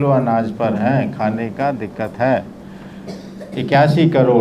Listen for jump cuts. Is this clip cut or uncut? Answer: uncut